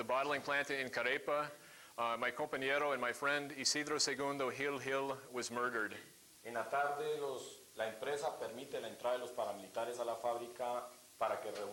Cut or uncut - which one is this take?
uncut